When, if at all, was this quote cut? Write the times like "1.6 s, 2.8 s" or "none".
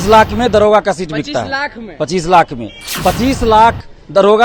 none